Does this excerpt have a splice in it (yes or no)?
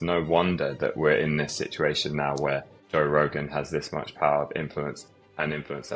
yes